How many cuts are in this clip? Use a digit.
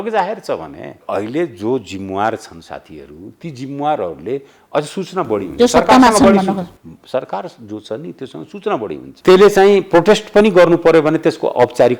2